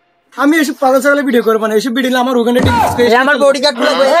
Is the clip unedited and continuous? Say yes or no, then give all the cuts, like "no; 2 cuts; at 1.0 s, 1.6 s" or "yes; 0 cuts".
yes; 0 cuts